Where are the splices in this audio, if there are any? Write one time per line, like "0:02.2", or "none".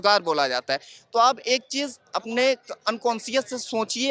none